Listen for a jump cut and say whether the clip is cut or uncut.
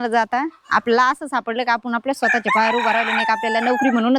uncut